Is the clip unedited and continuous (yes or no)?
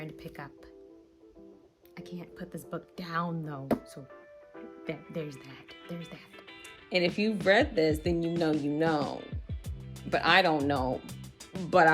no